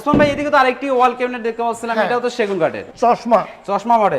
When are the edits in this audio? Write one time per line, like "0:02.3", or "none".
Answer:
0:02.9